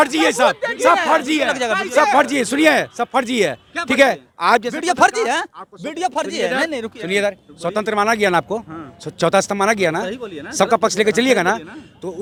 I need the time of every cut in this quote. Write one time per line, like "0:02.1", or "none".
none